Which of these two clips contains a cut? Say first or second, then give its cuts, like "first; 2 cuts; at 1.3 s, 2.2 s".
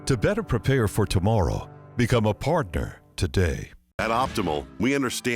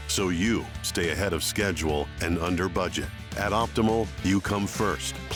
first; 1 cut; at 3.8 s